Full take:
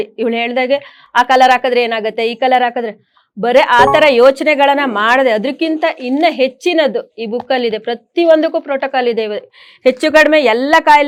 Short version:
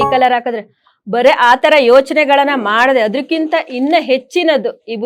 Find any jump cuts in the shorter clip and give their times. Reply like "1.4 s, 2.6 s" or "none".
none